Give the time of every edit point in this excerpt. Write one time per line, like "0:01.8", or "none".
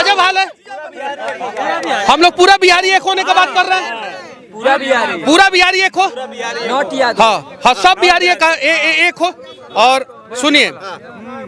none